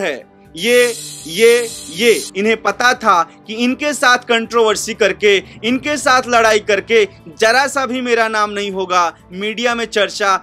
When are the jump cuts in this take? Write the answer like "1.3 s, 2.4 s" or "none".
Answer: 2.3 s